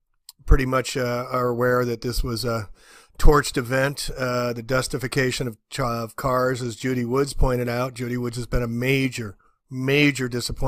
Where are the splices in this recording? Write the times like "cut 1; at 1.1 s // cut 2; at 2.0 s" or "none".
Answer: cut 1; at 3.5 s